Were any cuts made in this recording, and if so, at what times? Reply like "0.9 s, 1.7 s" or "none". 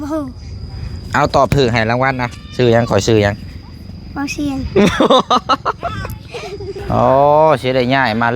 6.8 s